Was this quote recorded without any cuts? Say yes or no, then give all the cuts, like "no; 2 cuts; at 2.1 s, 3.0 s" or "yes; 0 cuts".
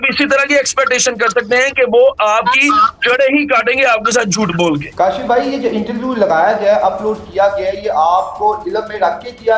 no; 1 cut; at 4.9 s